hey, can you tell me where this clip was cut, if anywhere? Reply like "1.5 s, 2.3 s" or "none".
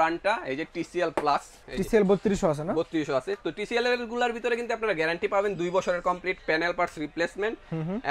1.6 s